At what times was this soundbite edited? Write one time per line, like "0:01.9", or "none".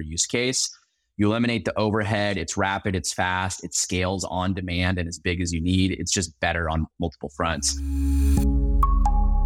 0:07.7